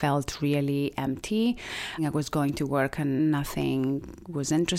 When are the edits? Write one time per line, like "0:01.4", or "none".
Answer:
0:02.0
0:03.2